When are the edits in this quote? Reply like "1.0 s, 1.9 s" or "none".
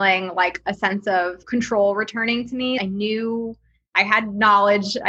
1.4 s, 2.8 s

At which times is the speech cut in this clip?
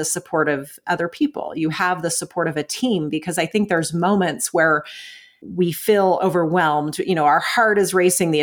5.4 s

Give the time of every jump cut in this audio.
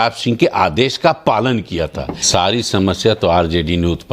2.2 s

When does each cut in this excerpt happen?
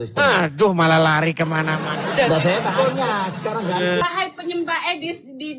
4.0 s

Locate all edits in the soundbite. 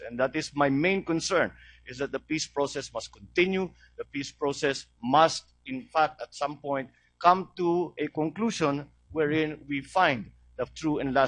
none

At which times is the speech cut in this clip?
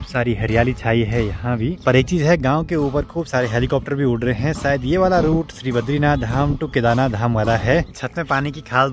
none

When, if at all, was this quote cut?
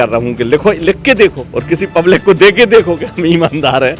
1.5 s

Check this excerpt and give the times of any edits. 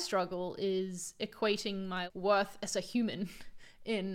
2.0 s

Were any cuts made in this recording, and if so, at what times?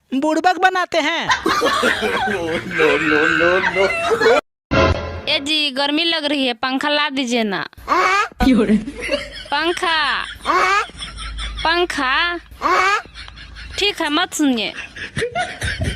4.6 s

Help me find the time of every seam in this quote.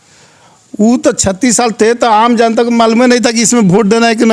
none

